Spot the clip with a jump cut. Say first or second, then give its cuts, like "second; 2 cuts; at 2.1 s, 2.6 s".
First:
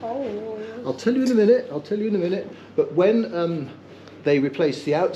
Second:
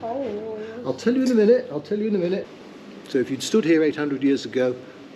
second; 1 cut; at 2.6 s